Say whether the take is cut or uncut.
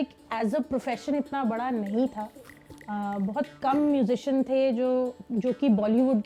uncut